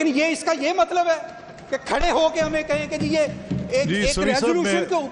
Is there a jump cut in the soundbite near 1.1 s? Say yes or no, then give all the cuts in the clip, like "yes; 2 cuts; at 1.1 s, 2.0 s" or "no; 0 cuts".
no; 0 cuts